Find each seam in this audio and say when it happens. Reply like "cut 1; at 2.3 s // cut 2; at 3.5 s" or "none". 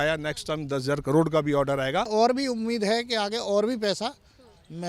cut 1; at 2.1 s

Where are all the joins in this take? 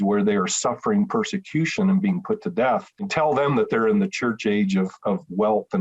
cut 1; at 3.0 s

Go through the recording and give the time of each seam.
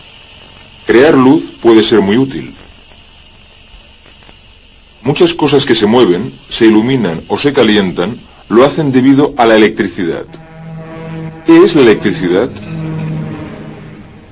none

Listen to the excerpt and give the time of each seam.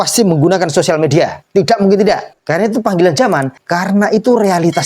cut 1; at 1.4 s // cut 2; at 2.3 s // cut 3; at 3.6 s

